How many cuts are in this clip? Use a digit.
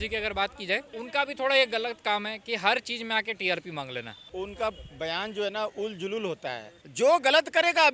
3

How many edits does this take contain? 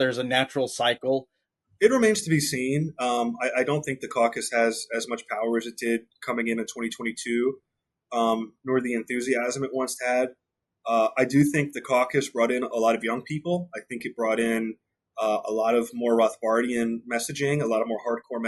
1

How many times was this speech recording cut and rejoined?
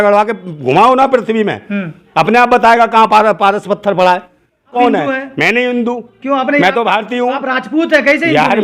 1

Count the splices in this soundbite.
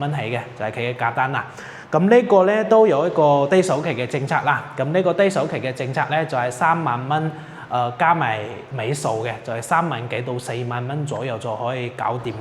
0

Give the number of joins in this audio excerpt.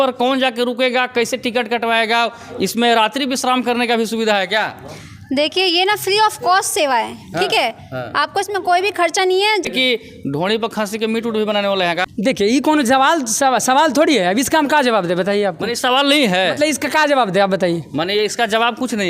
2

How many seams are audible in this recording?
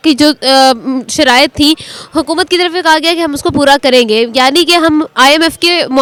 0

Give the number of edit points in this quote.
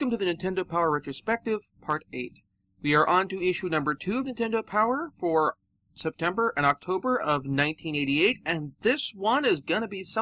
1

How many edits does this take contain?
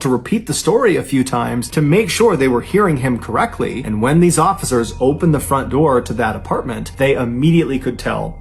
3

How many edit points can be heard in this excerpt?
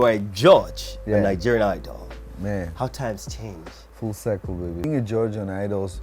1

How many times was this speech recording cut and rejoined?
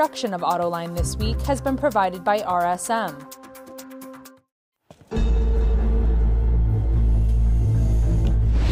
2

